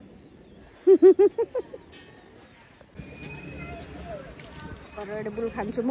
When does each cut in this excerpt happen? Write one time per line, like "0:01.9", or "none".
0:02.9